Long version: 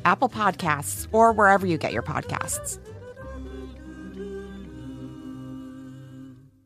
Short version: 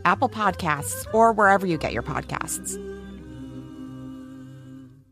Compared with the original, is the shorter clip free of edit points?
no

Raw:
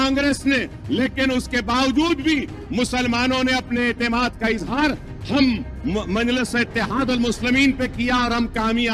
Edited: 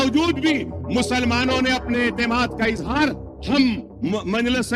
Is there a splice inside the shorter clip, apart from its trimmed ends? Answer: no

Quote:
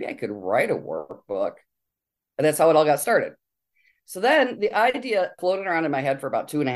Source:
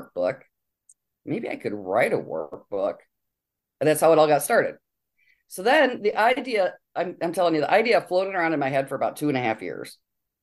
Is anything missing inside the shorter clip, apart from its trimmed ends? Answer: yes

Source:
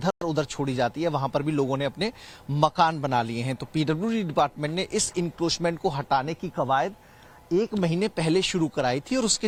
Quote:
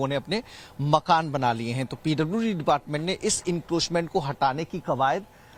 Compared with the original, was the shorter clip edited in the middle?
no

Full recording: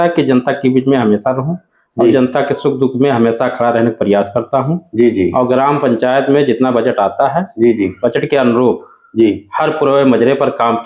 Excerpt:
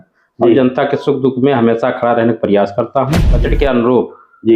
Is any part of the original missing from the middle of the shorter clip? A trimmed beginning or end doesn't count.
yes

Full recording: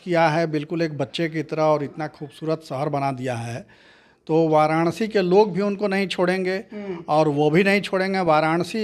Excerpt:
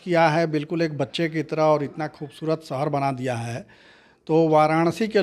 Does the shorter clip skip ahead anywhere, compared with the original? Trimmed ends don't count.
no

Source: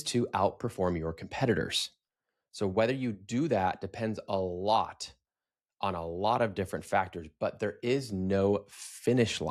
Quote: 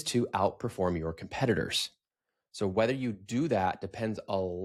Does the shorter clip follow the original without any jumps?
yes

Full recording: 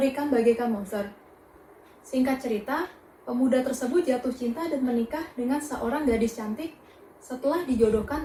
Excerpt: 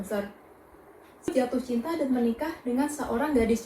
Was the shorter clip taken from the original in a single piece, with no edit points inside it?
no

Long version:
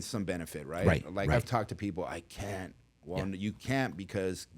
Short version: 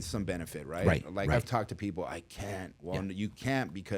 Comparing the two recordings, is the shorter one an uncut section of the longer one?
no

